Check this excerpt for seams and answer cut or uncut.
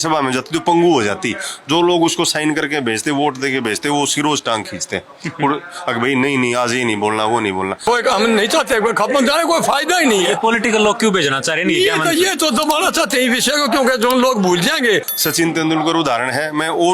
cut